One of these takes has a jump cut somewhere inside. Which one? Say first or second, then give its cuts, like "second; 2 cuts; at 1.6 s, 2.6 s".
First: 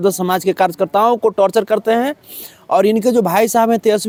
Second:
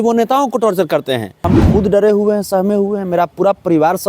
second; 1 cut; at 1.5 s